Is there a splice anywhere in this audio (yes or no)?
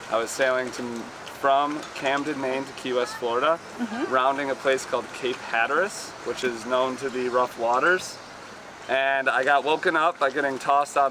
no